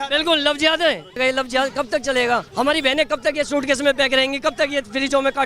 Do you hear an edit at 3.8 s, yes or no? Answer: no